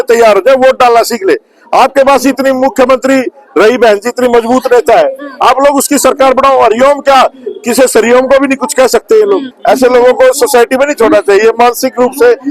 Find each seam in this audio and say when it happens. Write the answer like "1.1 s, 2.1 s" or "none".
9.5 s